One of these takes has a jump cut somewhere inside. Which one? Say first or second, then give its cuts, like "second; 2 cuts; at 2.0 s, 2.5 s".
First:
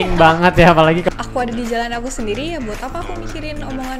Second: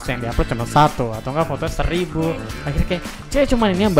first; 1 cut; at 1.0 s